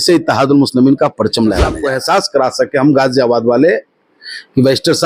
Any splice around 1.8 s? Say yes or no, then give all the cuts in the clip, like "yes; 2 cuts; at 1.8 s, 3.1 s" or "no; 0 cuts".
yes; 1 cut; at 1.8 s